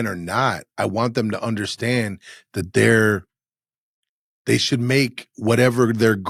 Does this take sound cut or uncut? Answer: uncut